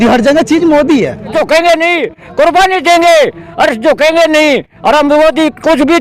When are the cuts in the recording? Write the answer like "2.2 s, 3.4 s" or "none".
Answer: 1.3 s

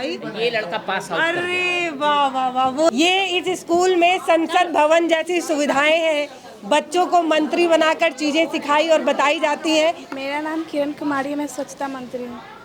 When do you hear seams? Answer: 2.9 s, 10.1 s

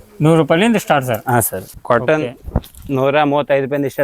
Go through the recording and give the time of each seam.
1.7 s

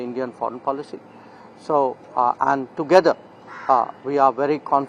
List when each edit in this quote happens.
none

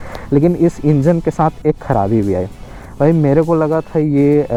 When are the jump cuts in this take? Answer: none

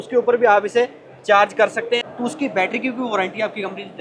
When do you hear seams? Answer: 2.1 s

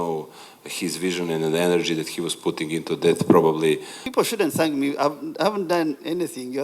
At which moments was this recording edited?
4.0 s

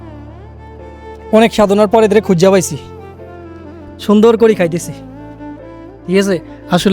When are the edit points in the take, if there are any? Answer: 1.3 s

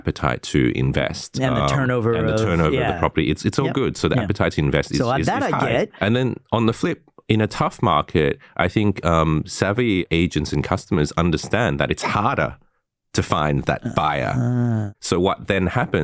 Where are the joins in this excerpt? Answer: 5.9 s, 14.9 s

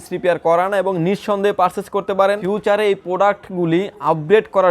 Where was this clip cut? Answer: 2.4 s

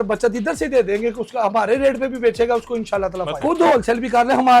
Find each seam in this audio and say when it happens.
3.4 s

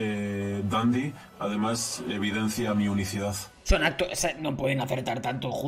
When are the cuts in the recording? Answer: 3.5 s

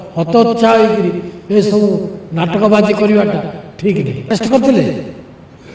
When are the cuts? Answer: 4.3 s

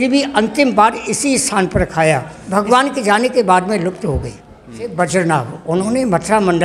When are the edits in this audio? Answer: 2.4 s, 4.9 s

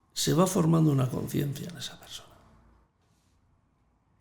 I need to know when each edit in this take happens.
none

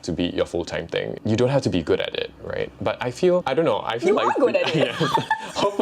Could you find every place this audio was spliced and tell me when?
1.1 s, 3.4 s

